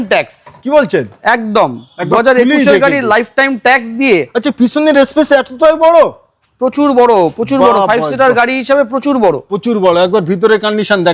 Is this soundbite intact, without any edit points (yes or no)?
yes